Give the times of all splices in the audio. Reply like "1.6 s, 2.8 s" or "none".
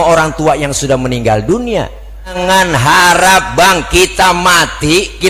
2.3 s